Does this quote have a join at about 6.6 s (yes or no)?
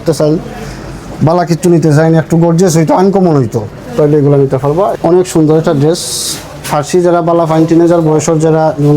no